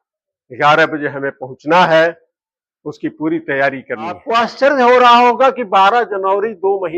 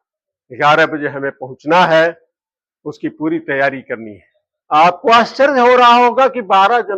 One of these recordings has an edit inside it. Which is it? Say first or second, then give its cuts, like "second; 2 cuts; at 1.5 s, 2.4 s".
first; 1 cut; at 4.2 s